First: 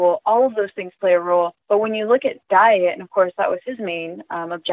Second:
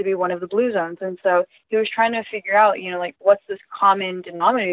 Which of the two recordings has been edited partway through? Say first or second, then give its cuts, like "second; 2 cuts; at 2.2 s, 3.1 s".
first; 1 cut; at 1.6 s